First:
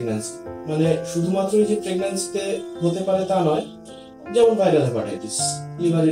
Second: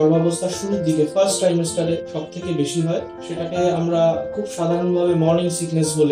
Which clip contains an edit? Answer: second; 2 cuts; at 2.1 s, 3.2 s

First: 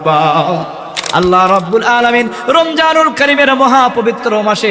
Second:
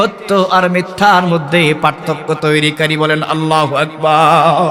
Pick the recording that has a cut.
first; 1 cut; at 1.0 s

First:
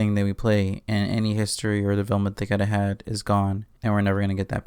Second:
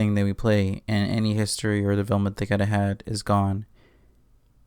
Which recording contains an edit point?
first; 1 cut; at 3.7 s

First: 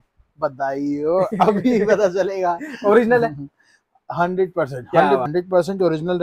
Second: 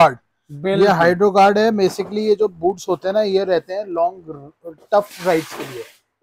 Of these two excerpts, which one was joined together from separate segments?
first; 1 cut; at 5.2 s

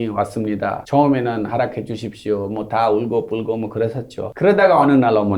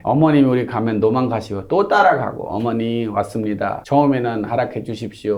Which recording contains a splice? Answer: first; 1 cut; at 4.2 s

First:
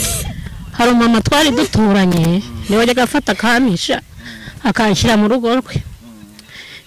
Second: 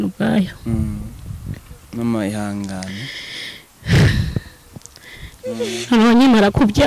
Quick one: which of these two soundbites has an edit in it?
second; 1 cut; at 5.3 s

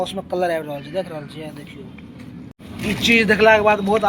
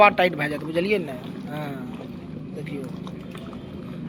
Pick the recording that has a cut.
first; 1 cut; at 2.5 s

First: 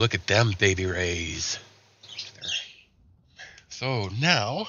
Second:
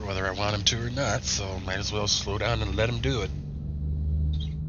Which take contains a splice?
first; 1 cut; at 2.4 s

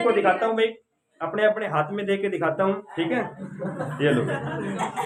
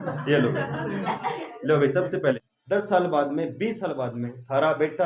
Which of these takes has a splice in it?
second; 1 cut; at 2.4 s

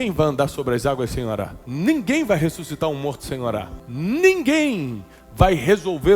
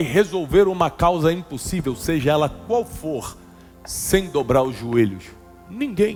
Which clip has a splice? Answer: first; 2 cuts; at 1.6 s, 3.8 s

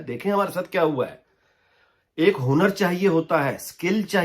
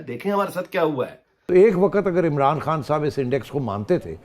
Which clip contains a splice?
second; 1 cut; at 1.3 s

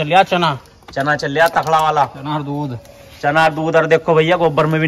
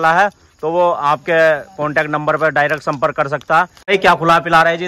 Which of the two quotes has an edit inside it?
second; 1 cut; at 3.9 s

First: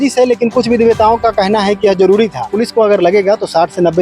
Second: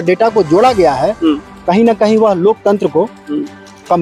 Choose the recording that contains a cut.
first; 1 cut; at 2.5 s

